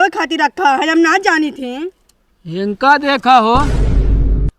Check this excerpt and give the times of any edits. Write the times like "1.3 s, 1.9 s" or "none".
3.7 s